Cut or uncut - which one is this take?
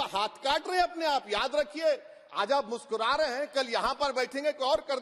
uncut